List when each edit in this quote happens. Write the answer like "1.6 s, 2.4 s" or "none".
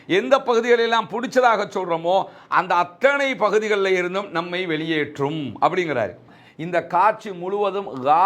6.4 s